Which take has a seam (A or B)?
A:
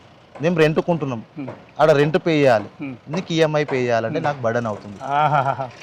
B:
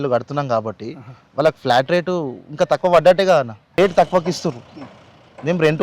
B